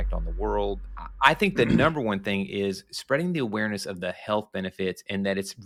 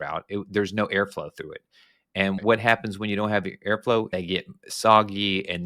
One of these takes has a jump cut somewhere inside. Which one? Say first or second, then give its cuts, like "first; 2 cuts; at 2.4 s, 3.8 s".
second; 1 cut; at 4.1 s